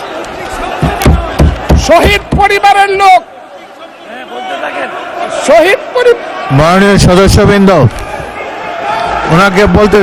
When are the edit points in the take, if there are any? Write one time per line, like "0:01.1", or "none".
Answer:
none